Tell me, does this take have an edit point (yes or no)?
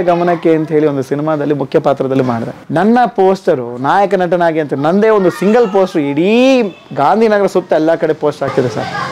no